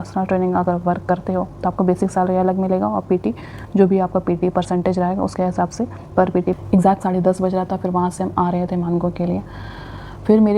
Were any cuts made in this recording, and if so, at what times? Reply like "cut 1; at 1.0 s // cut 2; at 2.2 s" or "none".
cut 1; at 6.5 s